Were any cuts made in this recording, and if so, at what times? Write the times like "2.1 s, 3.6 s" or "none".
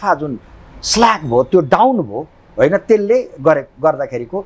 none